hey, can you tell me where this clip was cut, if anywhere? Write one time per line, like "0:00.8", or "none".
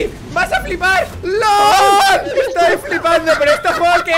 0:01.2
0:02.3